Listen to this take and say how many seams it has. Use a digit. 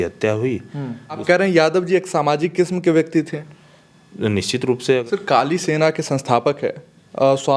2